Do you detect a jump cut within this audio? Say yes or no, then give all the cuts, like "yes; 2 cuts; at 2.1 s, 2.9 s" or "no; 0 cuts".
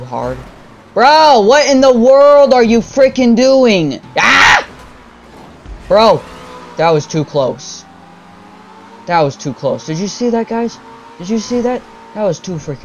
yes; 1 cut; at 4.0 s